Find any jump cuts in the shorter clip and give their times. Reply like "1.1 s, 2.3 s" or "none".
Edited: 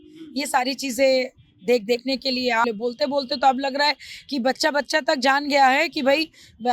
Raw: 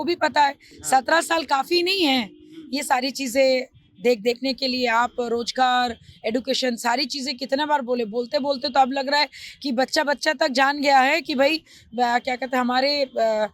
2.6 s